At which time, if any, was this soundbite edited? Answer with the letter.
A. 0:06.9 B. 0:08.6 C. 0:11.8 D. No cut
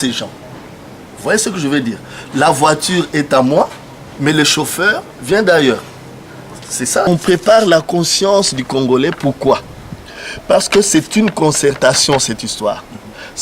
A